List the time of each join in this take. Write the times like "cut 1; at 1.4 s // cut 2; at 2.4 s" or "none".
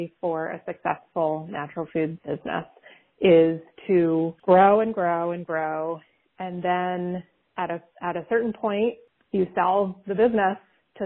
cut 1; at 2.2 s // cut 2; at 4.3 s